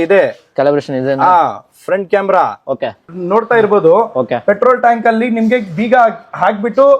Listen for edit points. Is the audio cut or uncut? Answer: cut